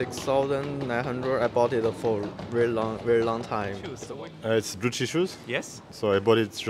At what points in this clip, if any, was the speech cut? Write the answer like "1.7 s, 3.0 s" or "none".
4.0 s